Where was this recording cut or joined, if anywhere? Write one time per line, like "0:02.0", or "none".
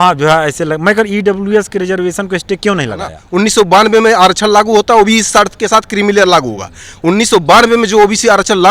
0:03.2